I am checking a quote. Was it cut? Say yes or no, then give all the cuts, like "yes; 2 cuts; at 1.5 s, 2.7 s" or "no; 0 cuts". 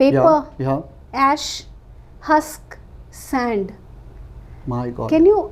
no; 0 cuts